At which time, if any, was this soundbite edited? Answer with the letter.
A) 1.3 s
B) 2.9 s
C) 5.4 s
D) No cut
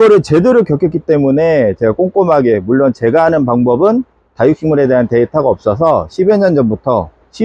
D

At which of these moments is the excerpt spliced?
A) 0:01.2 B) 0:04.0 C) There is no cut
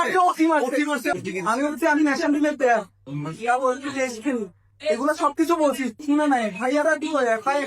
A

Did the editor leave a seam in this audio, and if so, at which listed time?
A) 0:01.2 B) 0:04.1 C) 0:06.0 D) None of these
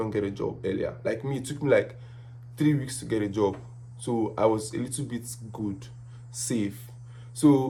D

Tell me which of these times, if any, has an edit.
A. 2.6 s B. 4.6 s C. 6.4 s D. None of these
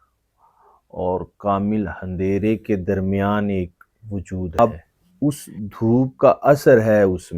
B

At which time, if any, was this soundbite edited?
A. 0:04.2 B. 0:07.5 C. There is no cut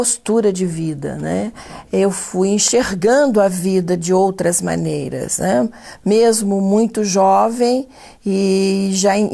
C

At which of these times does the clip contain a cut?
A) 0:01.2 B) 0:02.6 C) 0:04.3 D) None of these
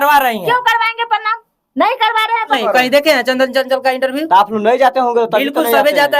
B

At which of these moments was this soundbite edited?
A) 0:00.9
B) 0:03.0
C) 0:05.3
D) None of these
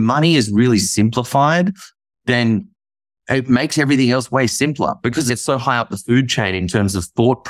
C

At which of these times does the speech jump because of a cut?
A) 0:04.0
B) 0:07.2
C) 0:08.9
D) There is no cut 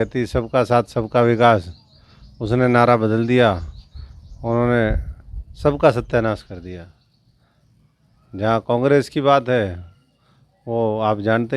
D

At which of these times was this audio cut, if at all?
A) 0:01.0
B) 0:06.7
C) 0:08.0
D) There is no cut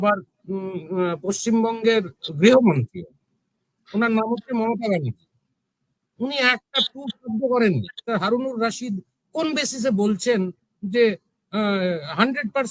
C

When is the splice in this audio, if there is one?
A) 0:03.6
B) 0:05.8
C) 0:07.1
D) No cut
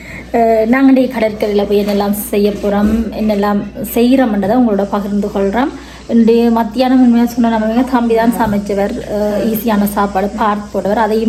D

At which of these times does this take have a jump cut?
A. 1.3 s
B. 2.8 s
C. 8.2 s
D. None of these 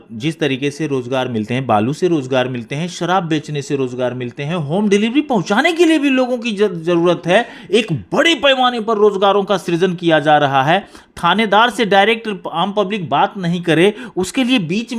D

